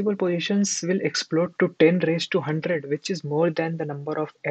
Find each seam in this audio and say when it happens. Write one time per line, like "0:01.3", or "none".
none